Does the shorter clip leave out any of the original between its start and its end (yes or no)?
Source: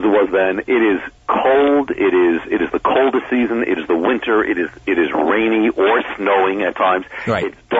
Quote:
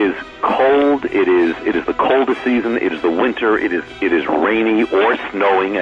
no